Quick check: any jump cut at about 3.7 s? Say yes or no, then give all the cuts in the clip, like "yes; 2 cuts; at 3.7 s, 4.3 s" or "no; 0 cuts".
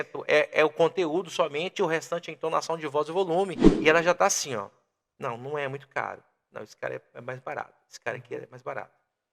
yes; 1 cut; at 3.7 s